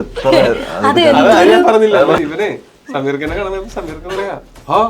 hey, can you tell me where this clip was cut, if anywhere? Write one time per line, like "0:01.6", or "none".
0:02.2